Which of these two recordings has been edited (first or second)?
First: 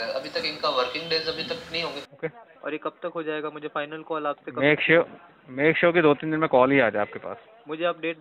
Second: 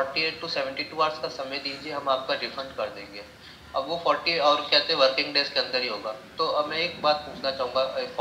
first